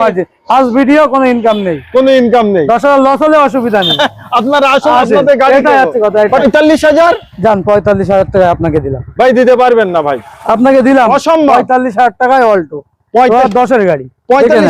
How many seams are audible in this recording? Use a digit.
1